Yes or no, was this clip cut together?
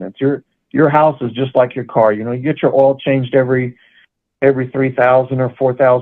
no